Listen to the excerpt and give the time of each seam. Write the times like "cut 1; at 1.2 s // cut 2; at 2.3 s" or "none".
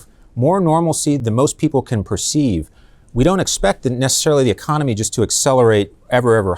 cut 1; at 1.2 s

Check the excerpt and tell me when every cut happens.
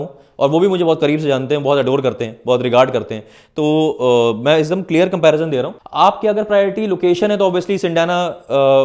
cut 1; at 5.8 s

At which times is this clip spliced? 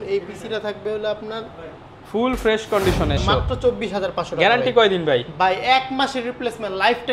cut 1; at 3.2 s

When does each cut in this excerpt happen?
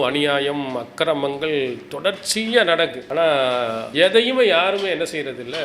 cut 1; at 3.0 s // cut 2; at 3.8 s

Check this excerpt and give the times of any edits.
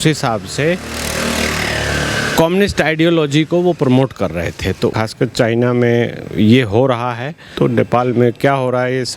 cut 1; at 4.9 s // cut 2; at 7.5 s

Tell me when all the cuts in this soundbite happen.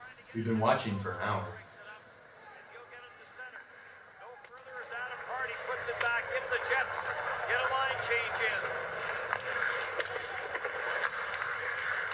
cut 1; at 1.6 s

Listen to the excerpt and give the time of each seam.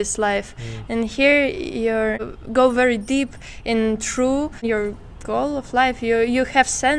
cut 1; at 2.4 s // cut 2; at 4.6 s

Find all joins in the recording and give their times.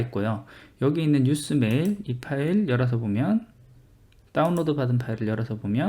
cut 1; at 4.0 s

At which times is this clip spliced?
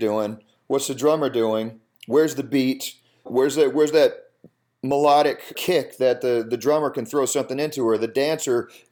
cut 1; at 3.3 s // cut 2; at 5.5 s

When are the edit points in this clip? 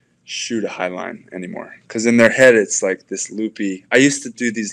none

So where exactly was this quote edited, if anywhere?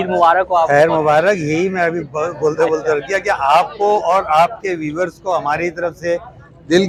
none

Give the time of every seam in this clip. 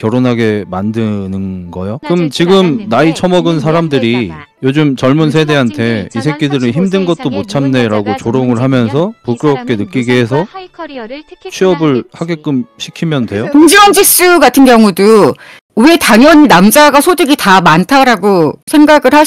cut 1; at 2.0 s // cut 2; at 13.5 s

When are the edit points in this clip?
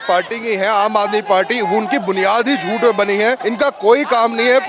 cut 1; at 3.4 s

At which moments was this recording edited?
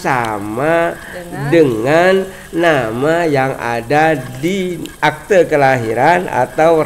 cut 1; at 4.9 s

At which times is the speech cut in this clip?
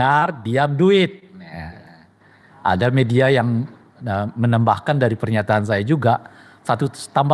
none

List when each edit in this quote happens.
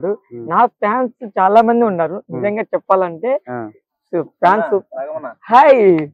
none

